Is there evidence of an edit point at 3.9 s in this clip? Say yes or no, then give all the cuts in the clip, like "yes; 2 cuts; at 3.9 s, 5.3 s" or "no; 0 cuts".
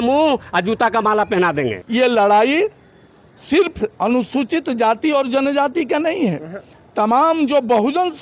no; 1 cut; at 1.8 s